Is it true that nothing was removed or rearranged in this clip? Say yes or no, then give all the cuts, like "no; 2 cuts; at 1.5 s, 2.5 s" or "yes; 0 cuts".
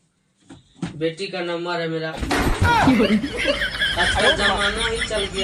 yes; 0 cuts